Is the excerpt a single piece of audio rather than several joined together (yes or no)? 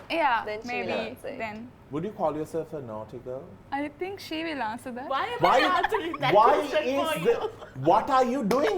no